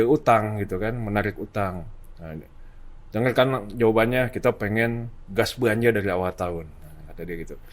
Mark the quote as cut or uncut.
uncut